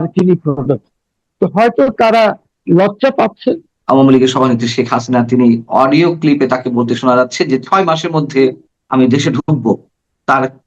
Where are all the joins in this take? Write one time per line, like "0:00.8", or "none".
0:03.7
0:08.8